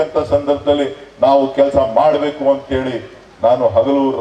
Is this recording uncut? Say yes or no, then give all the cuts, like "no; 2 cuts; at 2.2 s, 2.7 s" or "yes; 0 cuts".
yes; 0 cuts